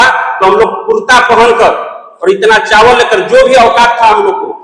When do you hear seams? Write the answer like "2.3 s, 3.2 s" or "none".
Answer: none